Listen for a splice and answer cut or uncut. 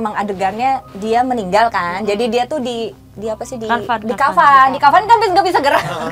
cut